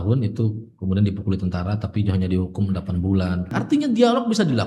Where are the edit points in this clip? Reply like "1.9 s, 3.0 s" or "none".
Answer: 3.6 s